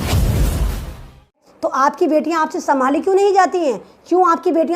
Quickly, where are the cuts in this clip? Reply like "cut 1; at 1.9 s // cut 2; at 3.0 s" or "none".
cut 1; at 1.4 s

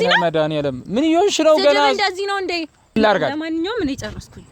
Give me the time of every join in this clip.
cut 1; at 3.0 s

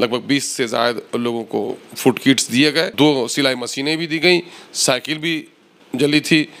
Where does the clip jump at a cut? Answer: cut 1; at 2.9 s

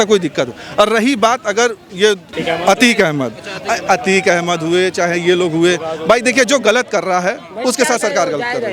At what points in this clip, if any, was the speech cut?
cut 1; at 2.3 s

